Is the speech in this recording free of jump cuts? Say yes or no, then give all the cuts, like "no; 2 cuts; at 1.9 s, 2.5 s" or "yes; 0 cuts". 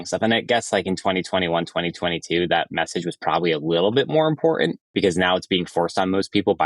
no; 1 cut; at 4.8 s